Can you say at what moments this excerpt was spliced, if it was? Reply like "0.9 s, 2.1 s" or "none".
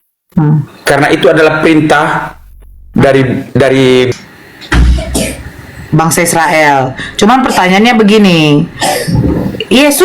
4.1 s